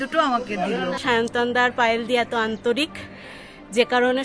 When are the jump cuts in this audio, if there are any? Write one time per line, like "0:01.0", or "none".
0:01.0

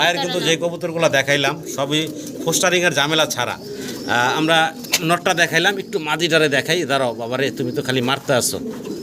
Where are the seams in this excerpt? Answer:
none

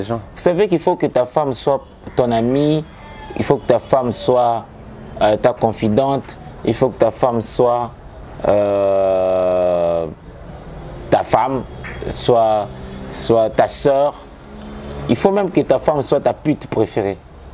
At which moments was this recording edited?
none

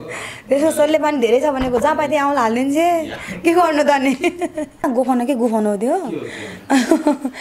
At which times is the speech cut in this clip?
0:04.8

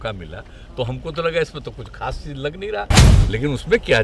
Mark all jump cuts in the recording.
0:03.1

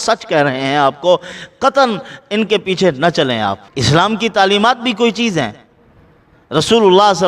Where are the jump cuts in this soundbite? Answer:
0:03.7

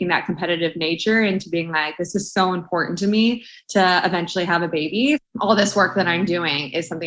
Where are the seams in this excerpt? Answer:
0:05.2

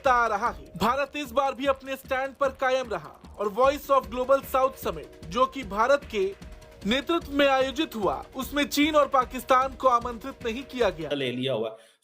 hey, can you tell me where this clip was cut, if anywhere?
0:11.1

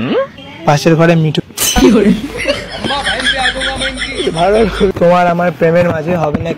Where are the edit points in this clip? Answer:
0:01.4
0:04.9

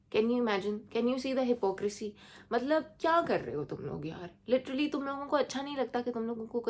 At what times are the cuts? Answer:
none

